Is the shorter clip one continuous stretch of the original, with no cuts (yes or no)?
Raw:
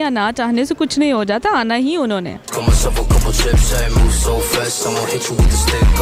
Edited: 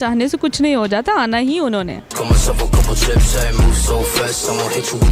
yes